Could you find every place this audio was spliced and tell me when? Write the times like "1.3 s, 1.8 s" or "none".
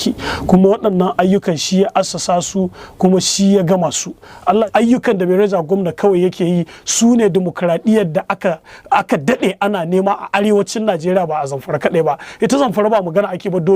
4.7 s